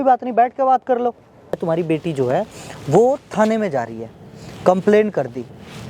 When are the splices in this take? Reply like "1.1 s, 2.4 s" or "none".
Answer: 1.6 s

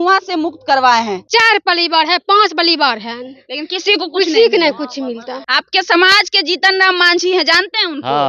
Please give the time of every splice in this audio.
1.2 s, 5.3 s

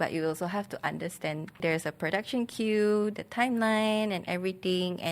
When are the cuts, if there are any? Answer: 1.6 s

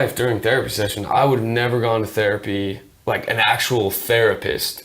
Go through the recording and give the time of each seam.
1.0 s, 2.9 s

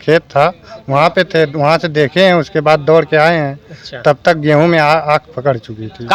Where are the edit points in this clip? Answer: none

